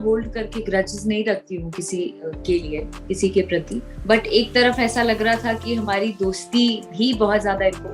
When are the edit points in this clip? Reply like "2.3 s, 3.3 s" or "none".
3.8 s